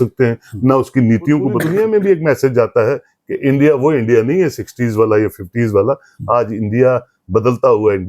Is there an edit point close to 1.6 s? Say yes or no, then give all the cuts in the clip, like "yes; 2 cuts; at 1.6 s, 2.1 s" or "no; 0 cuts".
yes; 1 cut; at 1.6 s